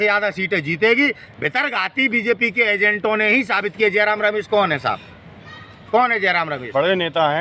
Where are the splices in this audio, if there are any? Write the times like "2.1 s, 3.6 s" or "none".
1.3 s